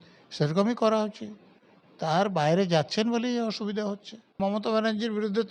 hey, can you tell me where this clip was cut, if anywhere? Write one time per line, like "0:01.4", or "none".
0:04.4